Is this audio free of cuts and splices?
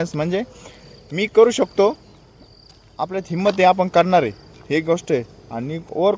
yes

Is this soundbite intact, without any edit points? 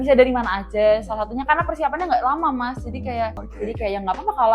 no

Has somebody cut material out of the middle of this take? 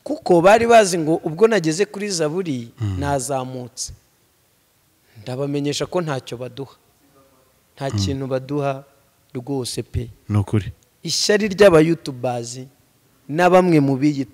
no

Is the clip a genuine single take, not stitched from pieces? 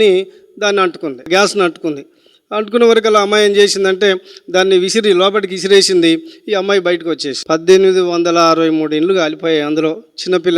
no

